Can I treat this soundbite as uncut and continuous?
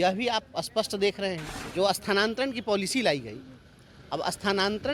no; 1 cut; at 1.6 s

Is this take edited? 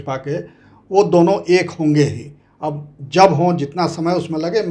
no; 0 cuts

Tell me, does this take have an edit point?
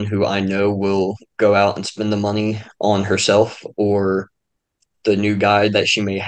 no; 0 cuts

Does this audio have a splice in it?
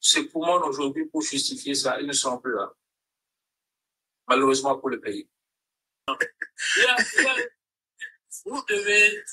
yes; 1 cut; at 6.1 s

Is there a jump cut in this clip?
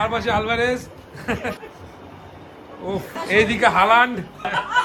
no; 0 cuts

